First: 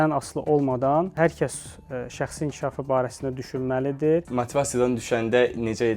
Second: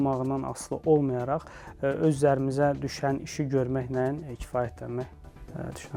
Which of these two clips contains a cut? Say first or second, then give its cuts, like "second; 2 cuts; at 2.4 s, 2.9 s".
first; 2 cuts; at 1.1 s, 4.3 s